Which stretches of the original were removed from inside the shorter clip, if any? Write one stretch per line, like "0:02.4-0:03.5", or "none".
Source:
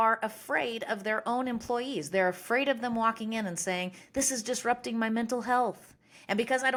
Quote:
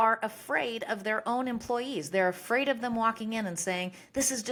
none